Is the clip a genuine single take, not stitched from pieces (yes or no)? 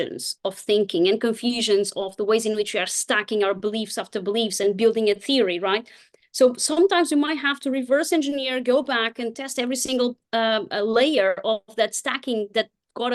yes